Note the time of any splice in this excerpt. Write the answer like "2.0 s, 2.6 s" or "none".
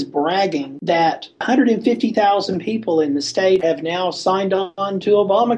3.6 s